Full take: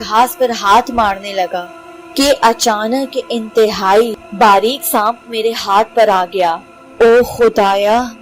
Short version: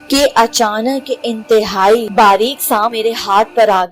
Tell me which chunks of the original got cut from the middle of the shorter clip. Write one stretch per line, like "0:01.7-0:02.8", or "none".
0:04.1-0:04.3
0:05.2-0:05.3